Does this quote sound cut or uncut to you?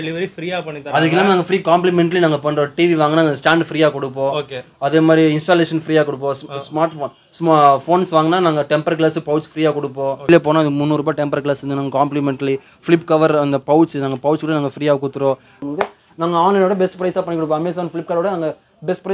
cut